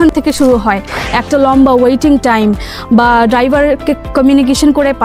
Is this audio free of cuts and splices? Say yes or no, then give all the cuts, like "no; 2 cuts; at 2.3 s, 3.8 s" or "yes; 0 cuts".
no; 1 cut; at 4.0 s